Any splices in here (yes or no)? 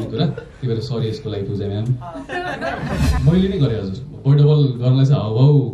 yes